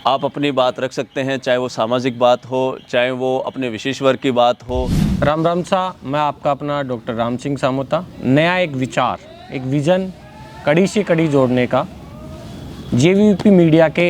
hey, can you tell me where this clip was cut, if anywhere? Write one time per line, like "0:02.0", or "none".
0:05.0
0:08.1